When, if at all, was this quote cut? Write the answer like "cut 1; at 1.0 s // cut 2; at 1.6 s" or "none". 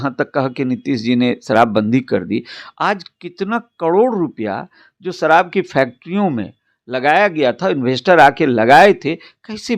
none